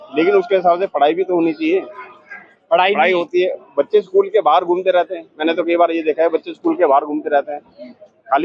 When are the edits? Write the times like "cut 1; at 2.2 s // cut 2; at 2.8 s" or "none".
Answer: none